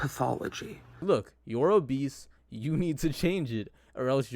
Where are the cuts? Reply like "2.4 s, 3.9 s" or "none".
1.0 s